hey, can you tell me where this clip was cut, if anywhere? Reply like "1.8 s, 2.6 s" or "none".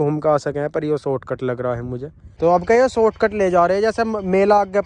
2.2 s